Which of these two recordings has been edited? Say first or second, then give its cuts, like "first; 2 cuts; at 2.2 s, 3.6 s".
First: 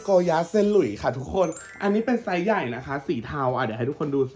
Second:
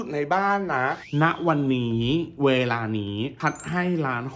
second; 1 cut; at 1.0 s